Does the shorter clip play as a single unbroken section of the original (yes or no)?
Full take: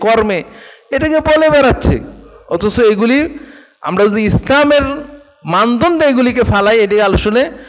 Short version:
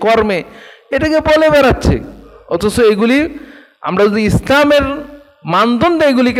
yes